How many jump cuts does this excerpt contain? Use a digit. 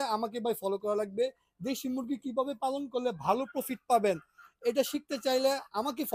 0